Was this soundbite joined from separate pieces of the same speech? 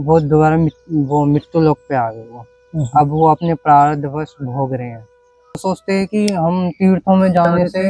yes; 1 cut; at 5.6 s

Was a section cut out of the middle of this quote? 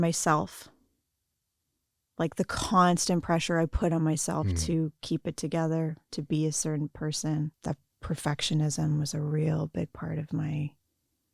yes; 1 cut; at 7.6 s

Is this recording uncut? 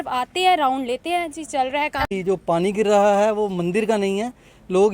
no; 1 cut; at 2.1 s

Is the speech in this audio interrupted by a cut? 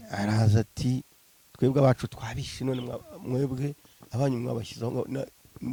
no; 0 cuts

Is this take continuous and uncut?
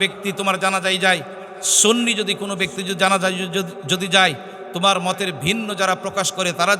yes; 0 cuts

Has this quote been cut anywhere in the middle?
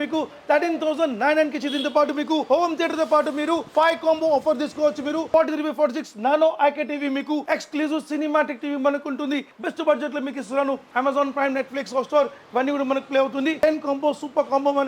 yes; 6 cuts; at 3.6 s, 5.3 s, 7.4 s, 9.5 s, 10.9 s, 13.6 s

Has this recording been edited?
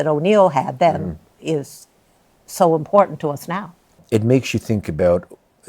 yes; 1 cut; at 4.0 s

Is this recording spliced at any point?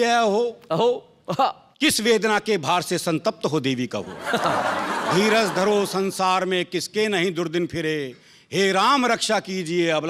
no; 0 cuts

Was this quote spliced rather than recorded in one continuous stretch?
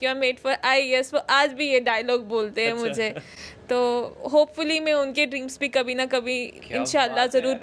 no; 0 cuts

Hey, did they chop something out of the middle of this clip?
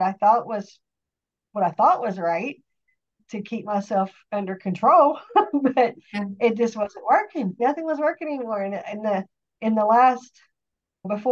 yes; 1 cut; at 7.5 s

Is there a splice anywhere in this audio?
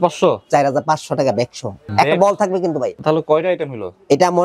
yes; 2 cuts; at 1.8 s, 3.0 s

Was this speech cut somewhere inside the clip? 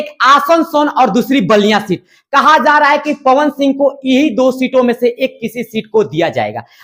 no; 0 cuts

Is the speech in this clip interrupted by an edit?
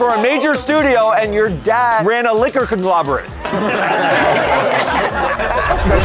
no; 0 cuts

